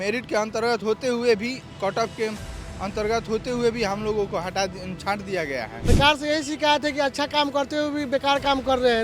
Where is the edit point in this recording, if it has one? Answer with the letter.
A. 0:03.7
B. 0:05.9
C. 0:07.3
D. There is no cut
B